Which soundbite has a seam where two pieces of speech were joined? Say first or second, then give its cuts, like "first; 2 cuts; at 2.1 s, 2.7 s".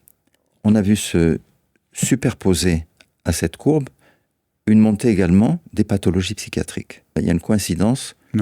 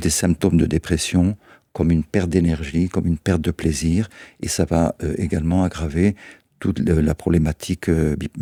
first; 1 cut; at 7.2 s